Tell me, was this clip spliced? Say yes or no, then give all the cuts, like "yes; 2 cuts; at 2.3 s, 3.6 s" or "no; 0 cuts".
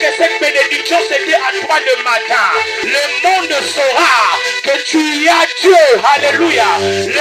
yes; 1 cut; at 2.8 s